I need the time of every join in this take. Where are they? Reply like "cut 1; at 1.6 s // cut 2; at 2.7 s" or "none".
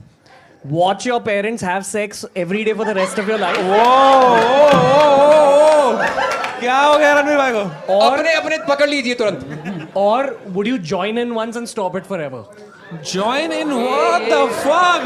none

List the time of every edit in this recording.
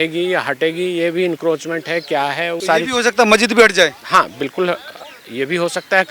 cut 1; at 2.6 s

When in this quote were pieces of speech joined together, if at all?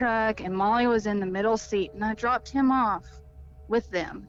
none

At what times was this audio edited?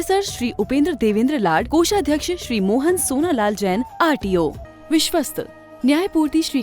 cut 1; at 4.7 s

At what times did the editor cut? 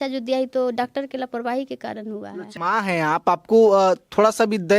cut 1; at 2.5 s

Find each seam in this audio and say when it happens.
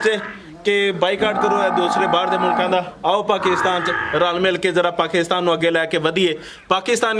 none

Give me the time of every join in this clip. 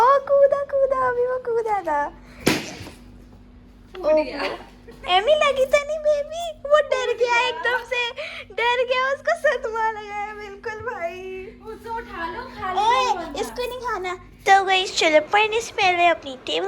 cut 1; at 14.4 s

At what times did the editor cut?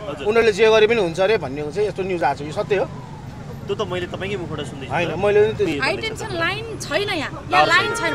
cut 1; at 5.7 s

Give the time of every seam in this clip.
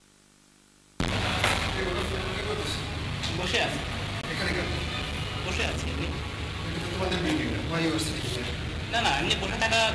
cut 1; at 7.4 s

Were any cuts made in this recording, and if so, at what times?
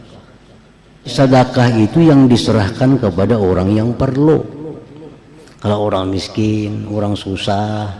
cut 1; at 1.1 s

